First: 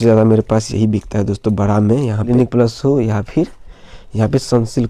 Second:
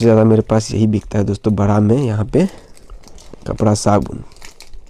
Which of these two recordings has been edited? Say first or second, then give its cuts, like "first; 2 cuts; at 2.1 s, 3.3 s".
first; 1 cut; at 2.3 s